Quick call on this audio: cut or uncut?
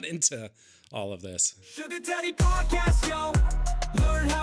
cut